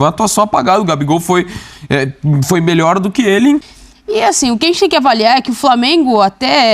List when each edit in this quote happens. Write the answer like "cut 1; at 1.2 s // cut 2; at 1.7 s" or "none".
cut 1; at 3.6 s